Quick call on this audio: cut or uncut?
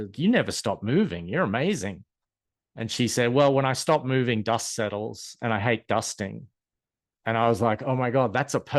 uncut